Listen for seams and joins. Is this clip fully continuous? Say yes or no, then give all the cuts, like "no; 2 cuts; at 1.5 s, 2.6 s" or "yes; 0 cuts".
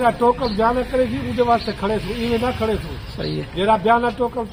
yes; 0 cuts